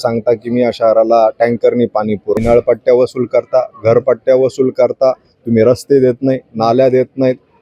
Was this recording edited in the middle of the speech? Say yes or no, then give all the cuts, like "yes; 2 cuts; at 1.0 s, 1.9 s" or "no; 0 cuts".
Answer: yes; 1 cut; at 2.4 s